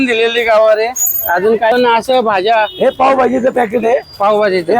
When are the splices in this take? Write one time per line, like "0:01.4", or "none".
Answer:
0:01.7